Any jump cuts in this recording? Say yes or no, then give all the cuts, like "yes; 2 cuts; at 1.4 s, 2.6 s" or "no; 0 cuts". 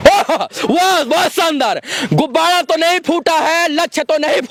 no; 0 cuts